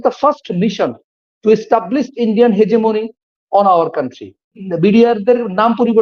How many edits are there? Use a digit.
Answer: 1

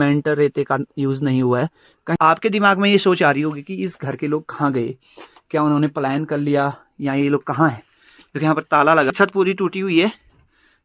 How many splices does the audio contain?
2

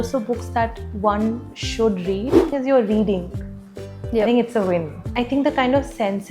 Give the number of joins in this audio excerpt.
2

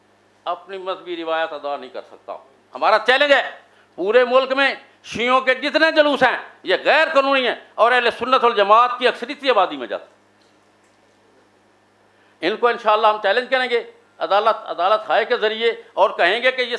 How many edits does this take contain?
0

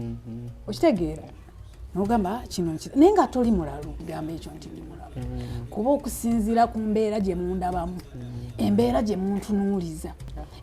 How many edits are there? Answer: 1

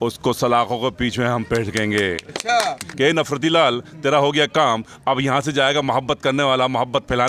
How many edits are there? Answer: 1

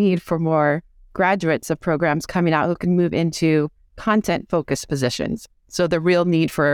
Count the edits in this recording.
0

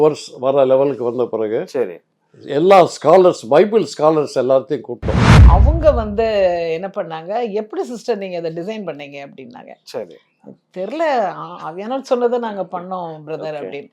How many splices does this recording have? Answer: 1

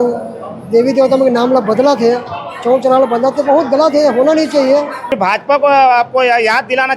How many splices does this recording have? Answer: 1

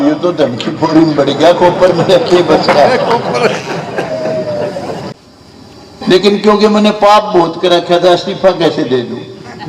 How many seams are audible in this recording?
1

